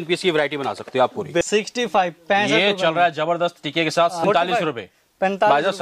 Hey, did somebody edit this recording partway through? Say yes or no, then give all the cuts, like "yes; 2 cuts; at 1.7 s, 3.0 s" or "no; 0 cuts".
yes; 2 cuts; at 1.4 s, 4.2 s